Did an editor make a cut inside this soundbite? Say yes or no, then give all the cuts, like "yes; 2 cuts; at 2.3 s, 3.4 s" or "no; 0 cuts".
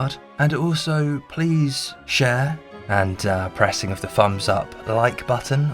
yes; 1 cut; at 2.7 s